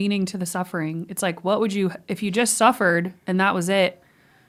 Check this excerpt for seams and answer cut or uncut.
uncut